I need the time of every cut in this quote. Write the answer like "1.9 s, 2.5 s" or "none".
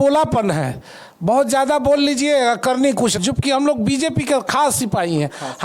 3.2 s